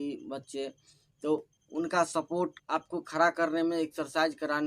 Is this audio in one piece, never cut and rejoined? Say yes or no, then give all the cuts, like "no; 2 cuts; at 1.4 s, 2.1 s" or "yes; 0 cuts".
no; 2 cuts; at 1.6 s, 2.6 s